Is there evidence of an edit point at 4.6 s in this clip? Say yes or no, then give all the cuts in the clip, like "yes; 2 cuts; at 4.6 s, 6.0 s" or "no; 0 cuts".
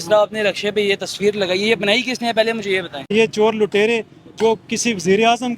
no; 1 cut; at 3.0 s